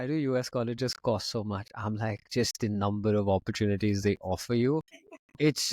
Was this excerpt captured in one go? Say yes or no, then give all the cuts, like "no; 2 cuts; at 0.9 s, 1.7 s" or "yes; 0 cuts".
yes; 0 cuts